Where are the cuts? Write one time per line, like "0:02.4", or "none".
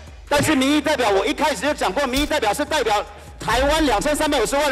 none